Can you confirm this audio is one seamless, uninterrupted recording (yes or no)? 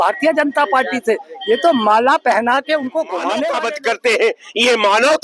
no